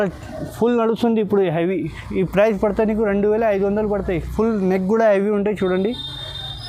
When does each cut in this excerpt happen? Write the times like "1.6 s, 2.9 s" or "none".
none